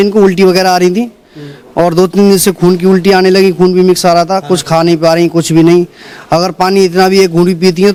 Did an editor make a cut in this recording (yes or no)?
no